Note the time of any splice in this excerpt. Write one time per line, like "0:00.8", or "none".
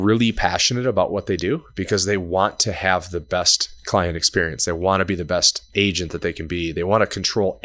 none